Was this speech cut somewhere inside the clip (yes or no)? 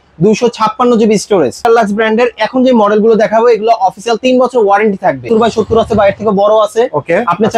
yes